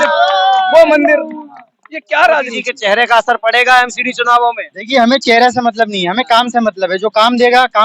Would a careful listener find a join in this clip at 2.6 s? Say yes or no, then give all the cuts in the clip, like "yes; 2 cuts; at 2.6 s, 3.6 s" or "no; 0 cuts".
yes; 1 cut; at 2.6 s